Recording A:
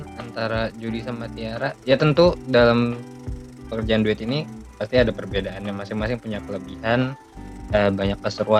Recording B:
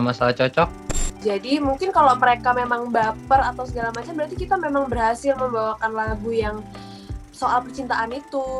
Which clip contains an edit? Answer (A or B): B